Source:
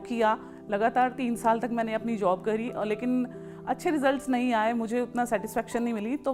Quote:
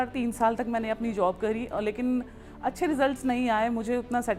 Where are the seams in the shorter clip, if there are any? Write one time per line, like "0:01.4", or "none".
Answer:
none